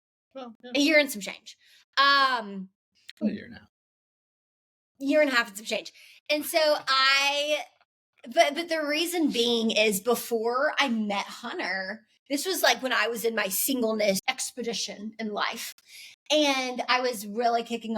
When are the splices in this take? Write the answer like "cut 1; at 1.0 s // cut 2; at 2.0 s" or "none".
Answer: cut 1; at 14.2 s